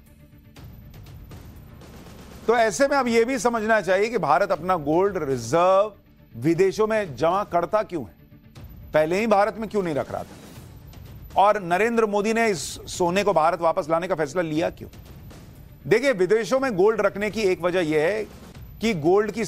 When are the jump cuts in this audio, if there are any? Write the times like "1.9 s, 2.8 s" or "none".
14.2 s